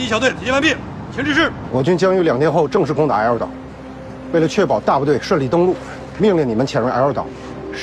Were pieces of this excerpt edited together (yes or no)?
yes